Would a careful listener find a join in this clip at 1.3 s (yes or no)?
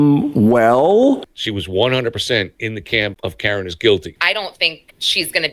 yes